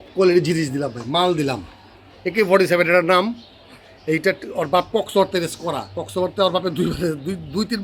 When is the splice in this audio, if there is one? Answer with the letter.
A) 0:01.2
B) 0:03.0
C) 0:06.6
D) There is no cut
D